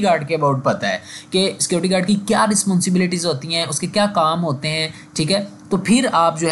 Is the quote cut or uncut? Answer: uncut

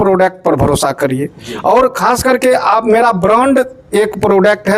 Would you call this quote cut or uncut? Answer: uncut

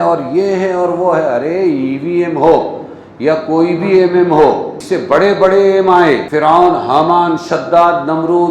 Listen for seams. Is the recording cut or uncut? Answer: cut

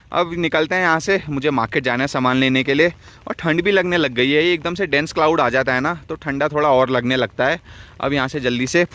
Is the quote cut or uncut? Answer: uncut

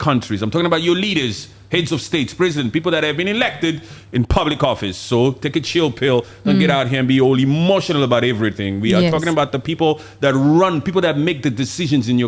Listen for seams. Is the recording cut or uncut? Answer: uncut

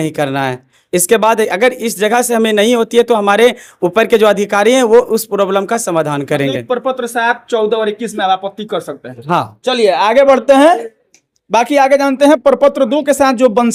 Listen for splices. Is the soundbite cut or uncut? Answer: uncut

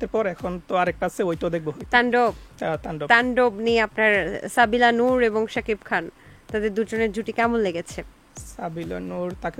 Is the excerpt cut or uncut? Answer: uncut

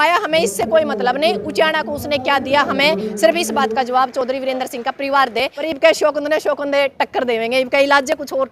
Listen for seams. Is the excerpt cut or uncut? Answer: cut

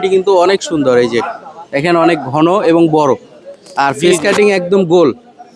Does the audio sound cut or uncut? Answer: uncut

